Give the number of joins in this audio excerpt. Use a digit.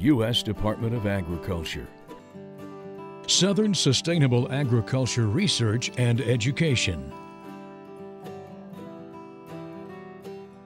0